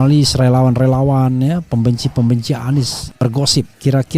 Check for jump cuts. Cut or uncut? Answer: cut